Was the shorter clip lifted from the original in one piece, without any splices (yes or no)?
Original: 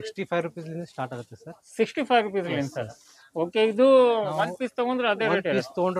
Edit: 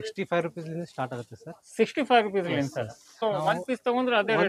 no